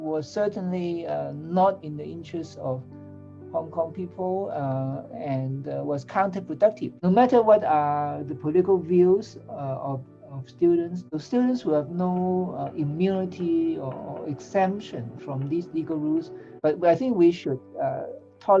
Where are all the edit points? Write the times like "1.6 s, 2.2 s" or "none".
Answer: 6.9 s, 11.0 s, 16.5 s

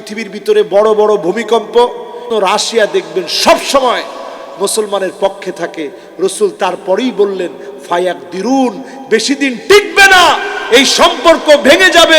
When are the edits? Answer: 2.3 s

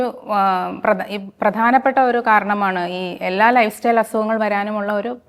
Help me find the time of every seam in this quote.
none

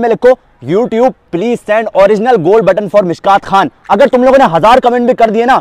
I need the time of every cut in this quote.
none

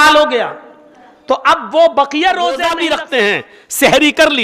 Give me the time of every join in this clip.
2.8 s

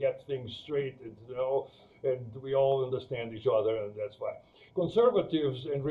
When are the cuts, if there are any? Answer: 4.6 s

